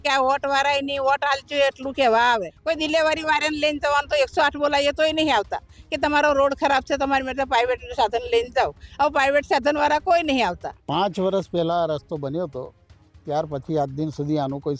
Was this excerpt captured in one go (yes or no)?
no